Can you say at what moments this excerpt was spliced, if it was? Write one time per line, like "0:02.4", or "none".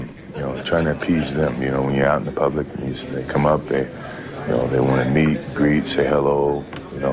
none